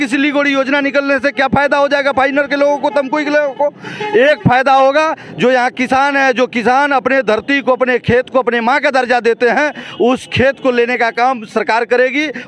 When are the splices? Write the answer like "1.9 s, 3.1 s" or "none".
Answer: none